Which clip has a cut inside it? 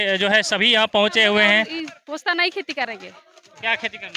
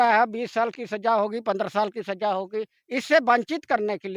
first; 1 cut; at 1.8 s

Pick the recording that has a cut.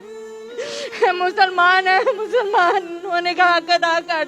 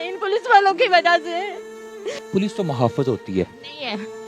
second; 1 cut; at 2.1 s

